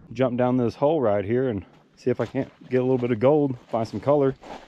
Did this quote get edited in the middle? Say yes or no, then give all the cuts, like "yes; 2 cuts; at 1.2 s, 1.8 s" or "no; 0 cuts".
no; 0 cuts